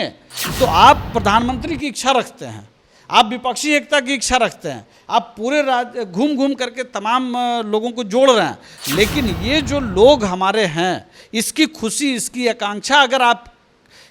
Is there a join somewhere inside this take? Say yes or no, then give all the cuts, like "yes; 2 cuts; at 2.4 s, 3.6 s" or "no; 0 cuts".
no; 0 cuts